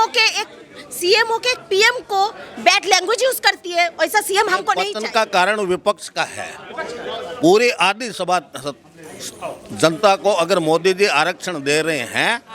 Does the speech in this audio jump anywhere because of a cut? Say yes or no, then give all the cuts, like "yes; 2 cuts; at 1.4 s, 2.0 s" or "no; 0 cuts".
yes; 1 cut; at 4.9 s